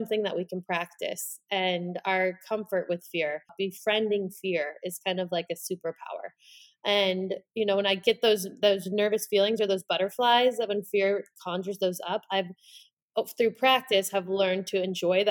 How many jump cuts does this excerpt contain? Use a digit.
0